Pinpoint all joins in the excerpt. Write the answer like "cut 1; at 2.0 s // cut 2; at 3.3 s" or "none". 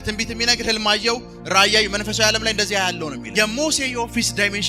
cut 1; at 3.2 s